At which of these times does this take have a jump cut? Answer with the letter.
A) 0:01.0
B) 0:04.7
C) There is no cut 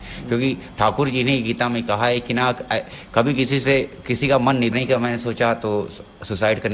B